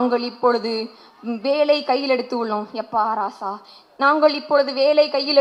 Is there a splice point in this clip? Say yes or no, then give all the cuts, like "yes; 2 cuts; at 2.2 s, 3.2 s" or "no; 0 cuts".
no; 0 cuts